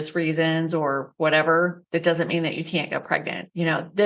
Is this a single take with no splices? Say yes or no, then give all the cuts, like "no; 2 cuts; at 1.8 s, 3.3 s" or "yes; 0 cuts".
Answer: no; 3 cuts; at 1.1 s, 1.8 s, 3.2 s